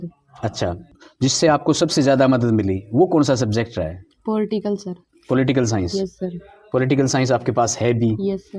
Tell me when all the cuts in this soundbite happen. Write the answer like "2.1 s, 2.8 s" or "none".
none